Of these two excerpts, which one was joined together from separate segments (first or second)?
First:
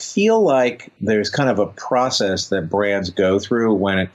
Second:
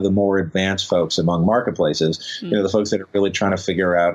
first